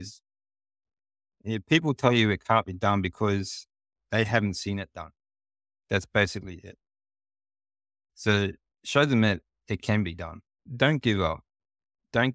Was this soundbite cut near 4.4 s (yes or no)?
no